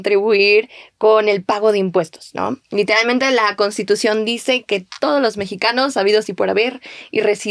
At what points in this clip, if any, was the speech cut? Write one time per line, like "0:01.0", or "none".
none